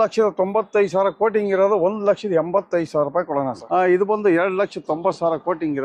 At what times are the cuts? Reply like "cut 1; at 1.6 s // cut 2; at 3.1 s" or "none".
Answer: cut 1; at 3.6 s